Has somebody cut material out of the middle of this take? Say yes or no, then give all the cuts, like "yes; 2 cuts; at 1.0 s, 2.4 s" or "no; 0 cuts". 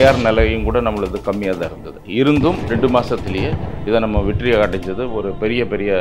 no; 0 cuts